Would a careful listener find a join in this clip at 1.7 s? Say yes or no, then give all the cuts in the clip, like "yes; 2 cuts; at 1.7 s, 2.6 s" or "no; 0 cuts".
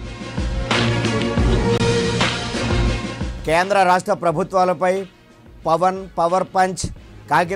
yes; 1 cut; at 1.7 s